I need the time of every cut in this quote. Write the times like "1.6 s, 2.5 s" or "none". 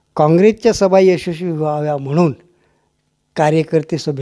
none